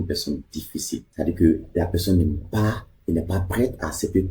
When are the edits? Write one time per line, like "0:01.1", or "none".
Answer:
0:01.1